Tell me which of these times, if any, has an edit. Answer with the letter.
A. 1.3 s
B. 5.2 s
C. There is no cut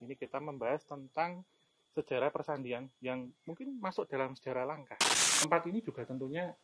B